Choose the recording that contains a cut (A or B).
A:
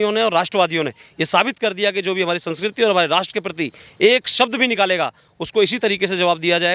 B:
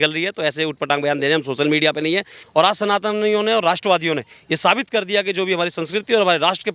B